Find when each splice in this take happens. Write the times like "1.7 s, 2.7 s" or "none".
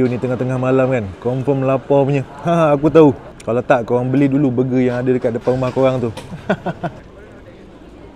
3.3 s, 7.0 s